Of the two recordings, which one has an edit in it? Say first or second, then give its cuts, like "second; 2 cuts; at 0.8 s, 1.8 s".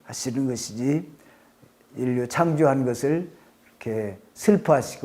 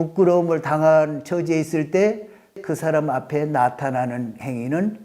second; 1 cut; at 2.6 s